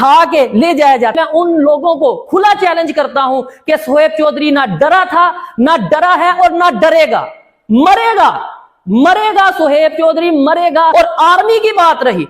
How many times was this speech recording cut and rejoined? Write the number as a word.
two